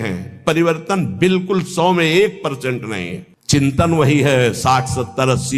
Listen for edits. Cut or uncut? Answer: cut